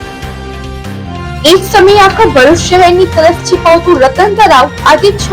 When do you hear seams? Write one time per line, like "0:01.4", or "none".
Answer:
0:01.1